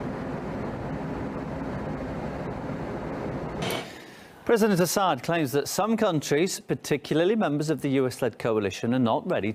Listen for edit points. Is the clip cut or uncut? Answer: uncut